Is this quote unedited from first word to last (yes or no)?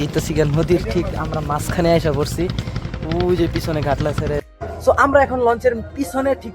no